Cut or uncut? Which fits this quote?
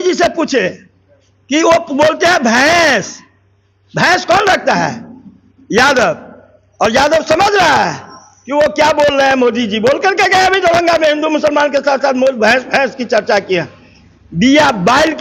uncut